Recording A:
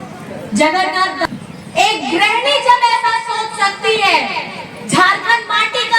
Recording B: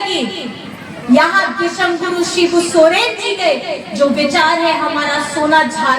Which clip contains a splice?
A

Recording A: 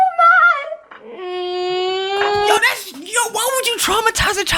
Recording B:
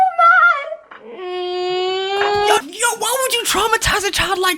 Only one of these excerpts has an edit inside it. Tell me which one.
B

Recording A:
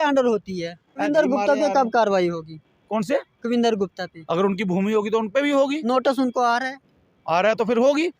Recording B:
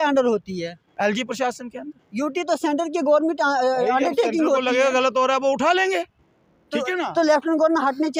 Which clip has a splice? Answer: A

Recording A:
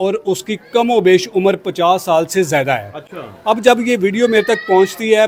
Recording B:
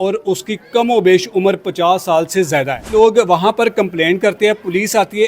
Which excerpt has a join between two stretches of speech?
B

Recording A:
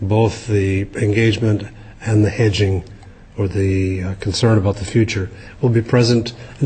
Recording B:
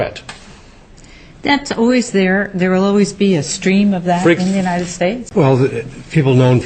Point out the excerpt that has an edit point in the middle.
B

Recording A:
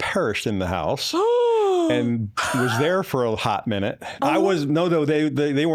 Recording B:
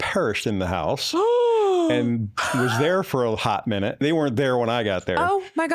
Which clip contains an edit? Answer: B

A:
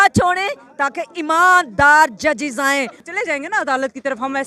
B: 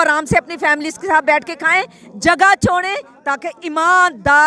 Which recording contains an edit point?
A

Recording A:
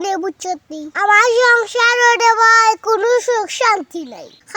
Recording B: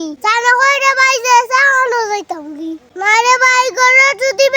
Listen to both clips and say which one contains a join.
B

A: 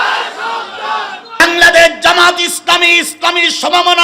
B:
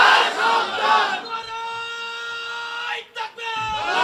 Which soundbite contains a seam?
A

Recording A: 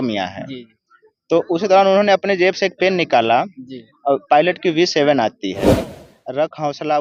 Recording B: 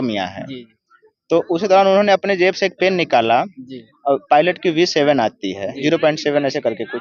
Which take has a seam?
A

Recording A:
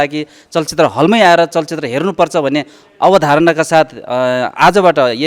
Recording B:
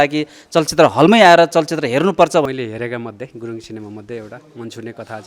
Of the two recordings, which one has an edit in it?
B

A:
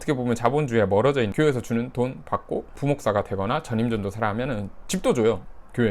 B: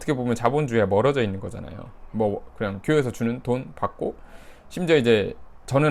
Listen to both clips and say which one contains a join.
A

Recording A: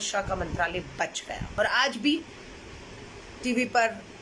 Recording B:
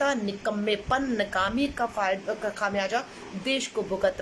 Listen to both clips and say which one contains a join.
A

